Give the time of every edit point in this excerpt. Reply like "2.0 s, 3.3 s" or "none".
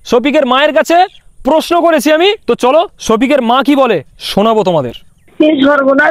2.4 s, 5.2 s